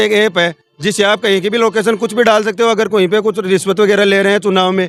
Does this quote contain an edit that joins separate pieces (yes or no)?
no